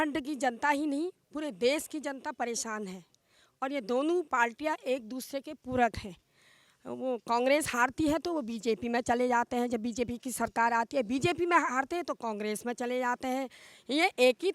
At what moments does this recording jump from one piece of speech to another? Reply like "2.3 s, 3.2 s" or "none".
none